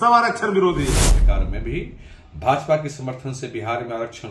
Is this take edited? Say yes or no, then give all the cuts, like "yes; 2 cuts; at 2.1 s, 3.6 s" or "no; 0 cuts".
yes; 1 cut; at 1.1 s